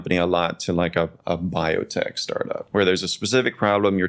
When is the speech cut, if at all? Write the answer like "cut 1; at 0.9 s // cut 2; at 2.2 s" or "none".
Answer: cut 1; at 2.6 s